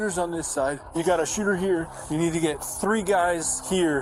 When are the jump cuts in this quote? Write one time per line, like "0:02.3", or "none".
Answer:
none